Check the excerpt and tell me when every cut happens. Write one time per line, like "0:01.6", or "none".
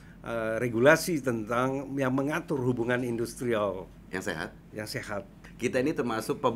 0:05.4